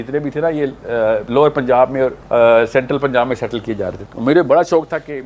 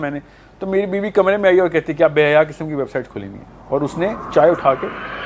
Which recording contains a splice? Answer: first; 2 cuts; at 2.2 s, 4.0 s

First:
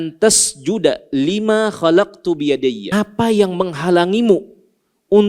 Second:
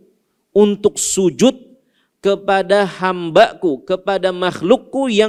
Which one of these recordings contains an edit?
first; 1 cut; at 2.8 s

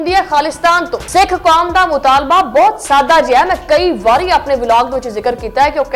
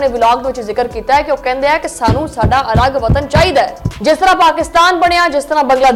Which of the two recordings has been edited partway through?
first; 1 cut; at 1.0 s

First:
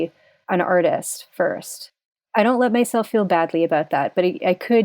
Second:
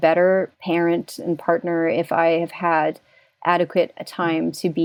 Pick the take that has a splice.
first; 1 cut; at 1.9 s

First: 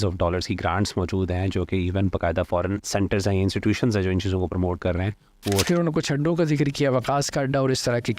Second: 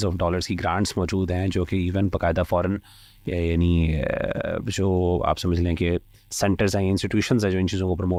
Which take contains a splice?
first; 2 cuts; at 2.8 s, 5.6 s

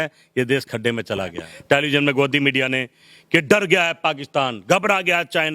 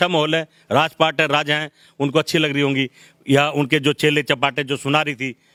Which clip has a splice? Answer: first; 1 cut; at 1.4 s

